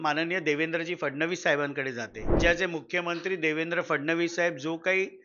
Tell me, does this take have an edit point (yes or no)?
yes